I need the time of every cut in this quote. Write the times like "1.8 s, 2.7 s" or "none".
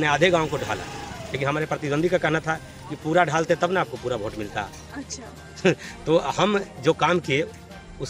none